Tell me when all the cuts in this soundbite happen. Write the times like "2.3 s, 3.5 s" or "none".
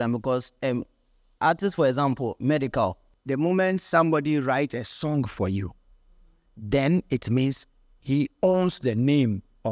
3.0 s